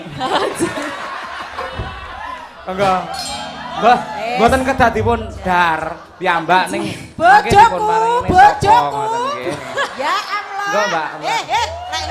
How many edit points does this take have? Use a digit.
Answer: 0